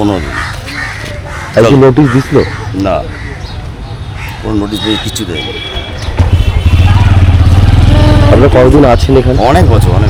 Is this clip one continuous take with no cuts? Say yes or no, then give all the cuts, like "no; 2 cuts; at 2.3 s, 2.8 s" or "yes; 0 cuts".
yes; 0 cuts